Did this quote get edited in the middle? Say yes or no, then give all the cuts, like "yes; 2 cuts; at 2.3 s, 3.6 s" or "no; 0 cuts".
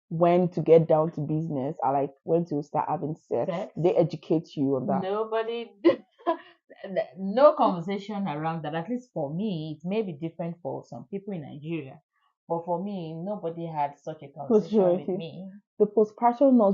no; 0 cuts